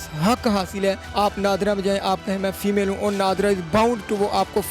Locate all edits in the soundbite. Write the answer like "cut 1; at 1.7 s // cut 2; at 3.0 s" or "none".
cut 1; at 1.0 s